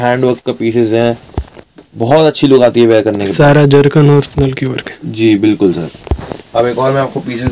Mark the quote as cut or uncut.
uncut